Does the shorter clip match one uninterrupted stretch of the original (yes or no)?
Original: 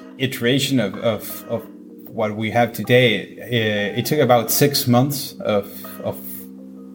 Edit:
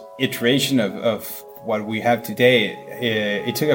no